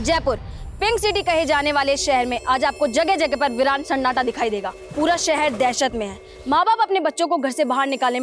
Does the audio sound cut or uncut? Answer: cut